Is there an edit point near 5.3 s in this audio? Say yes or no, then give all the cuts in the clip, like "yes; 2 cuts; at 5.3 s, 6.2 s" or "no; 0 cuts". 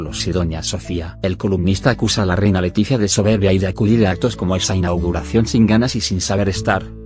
no; 1 cut; at 2.4 s